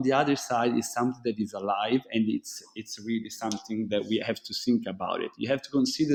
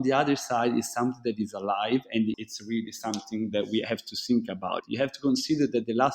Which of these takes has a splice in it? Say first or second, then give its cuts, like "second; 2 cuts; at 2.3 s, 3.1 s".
second; 2 cuts; at 2.3 s, 4.8 s